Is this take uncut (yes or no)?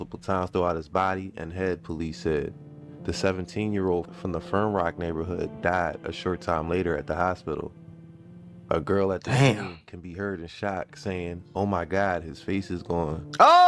yes